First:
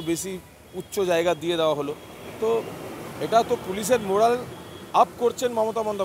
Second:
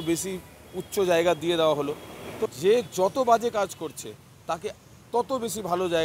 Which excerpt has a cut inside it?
second; 1 cut; at 2.5 s

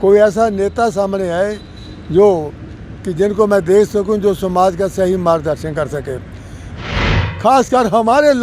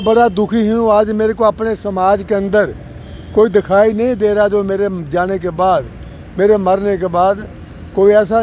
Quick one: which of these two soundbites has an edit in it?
first; 1 cut; at 7.0 s

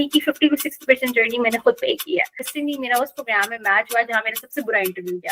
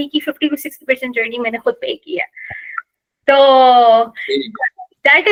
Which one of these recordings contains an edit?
first; 1 cut; at 2.4 s

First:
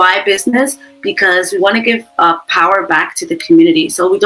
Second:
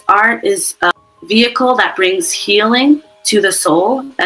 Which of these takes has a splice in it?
second; 1 cut; at 0.9 s

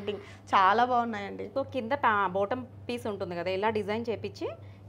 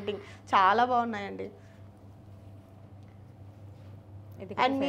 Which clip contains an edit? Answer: first; 1 cut; at 1.4 s

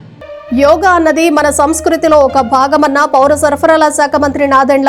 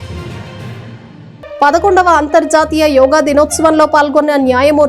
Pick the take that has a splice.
second; 1 cut; at 1.1 s

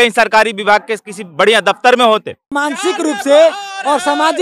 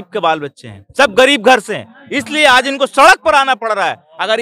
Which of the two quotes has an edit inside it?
first; 1 cut; at 2.5 s

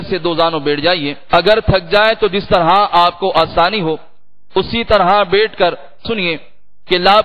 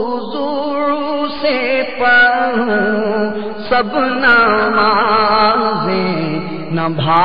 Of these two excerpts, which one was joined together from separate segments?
first; 2 cuts; at 1.1 s, 6.0 s

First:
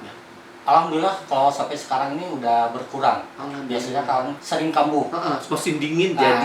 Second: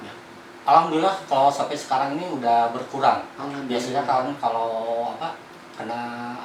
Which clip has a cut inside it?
first; 1 cut; at 4.3 s

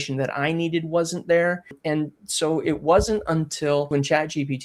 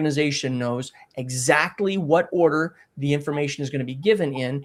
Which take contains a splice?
first; 2 cuts; at 1.7 s, 3.9 s

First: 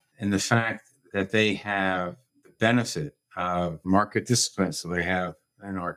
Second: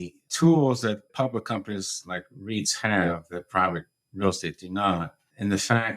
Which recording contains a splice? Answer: second; 1 cut; at 1.1 s

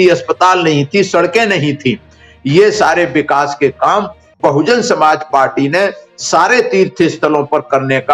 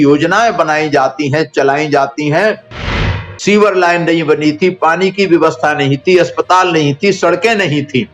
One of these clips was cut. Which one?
second; 1 cut; at 2.9 s

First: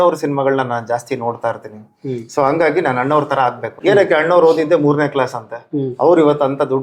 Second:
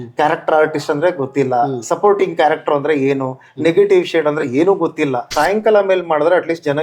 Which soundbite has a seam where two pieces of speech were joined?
second; 1 cut; at 5.3 s

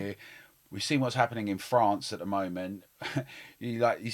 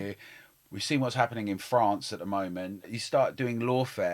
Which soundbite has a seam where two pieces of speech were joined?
second; 1 cut; at 3.0 s

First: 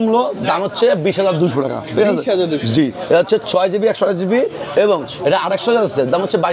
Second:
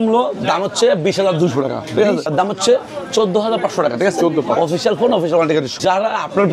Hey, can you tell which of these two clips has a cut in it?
second; 2 cuts; at 2.3 s, 5.7 s

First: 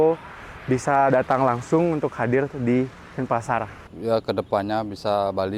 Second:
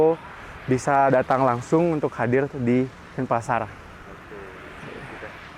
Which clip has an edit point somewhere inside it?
first; 1 cut; at 3.8 s

